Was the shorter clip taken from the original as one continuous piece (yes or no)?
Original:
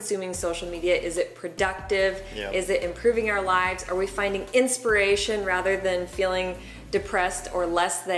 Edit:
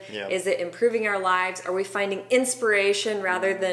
yes